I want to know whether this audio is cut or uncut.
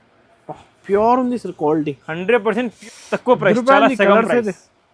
cut